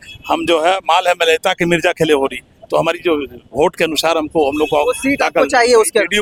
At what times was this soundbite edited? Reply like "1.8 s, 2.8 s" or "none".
none